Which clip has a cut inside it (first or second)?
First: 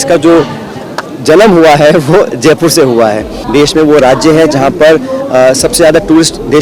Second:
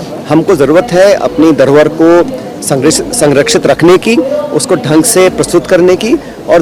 first